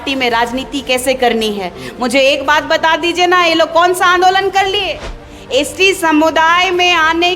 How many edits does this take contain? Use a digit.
1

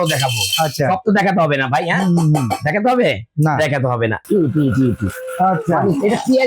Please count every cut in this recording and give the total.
1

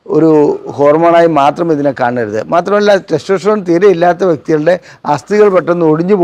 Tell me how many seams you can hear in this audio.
0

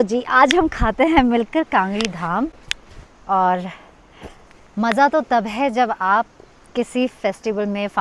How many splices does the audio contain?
0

